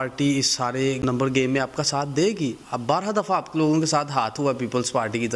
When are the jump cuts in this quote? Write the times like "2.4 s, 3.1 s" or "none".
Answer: 1.0 s